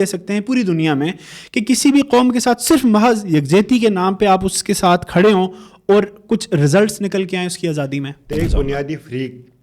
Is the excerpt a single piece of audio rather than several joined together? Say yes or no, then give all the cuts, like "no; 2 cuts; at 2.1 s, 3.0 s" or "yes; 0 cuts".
no; 1 cut; at 8.3 s